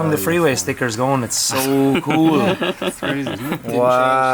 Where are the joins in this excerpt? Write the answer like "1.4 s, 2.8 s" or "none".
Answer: none